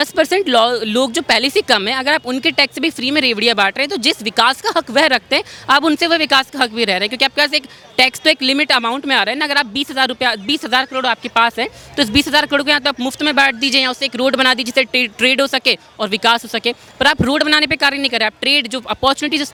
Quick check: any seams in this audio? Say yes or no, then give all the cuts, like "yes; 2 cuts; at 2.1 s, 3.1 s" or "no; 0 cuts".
no; 0 cuts